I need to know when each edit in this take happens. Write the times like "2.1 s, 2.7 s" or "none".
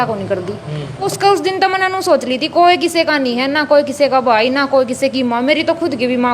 1.1 s